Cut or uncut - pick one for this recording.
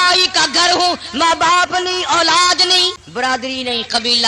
cut